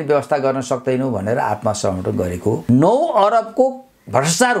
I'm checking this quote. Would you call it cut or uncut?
cut